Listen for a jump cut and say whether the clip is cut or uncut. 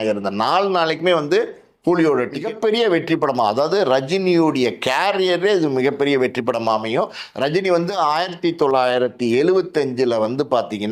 cut